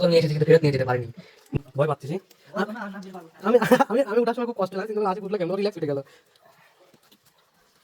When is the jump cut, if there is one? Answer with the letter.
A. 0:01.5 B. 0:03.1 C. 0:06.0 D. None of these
A